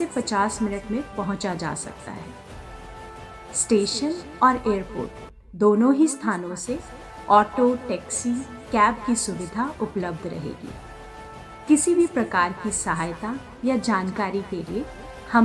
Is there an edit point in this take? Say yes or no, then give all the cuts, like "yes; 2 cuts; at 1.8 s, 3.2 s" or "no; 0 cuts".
no; 0 cuts